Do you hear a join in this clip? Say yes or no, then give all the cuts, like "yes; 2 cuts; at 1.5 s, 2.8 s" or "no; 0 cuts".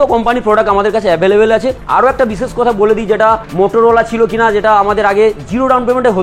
no; 0 cuts